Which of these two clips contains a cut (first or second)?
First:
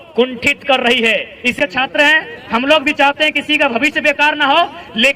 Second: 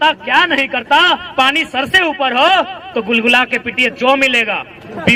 first